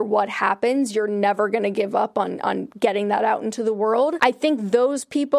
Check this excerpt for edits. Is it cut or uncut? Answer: cut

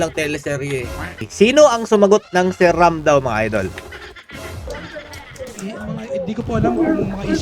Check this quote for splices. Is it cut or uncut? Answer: cut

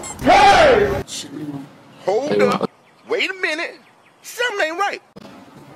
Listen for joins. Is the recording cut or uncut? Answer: uncut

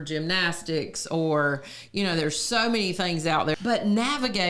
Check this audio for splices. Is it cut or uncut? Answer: cut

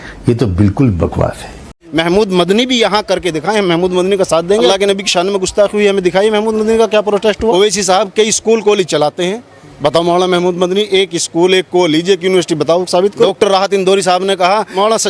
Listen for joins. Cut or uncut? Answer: cut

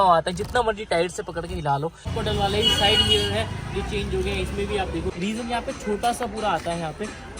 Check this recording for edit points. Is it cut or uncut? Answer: cut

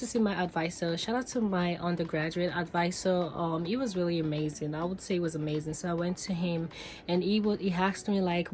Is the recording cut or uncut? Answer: uncut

